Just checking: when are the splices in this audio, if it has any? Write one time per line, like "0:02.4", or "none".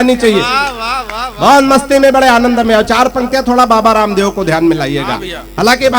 none